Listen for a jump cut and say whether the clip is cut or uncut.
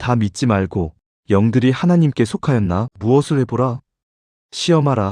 cut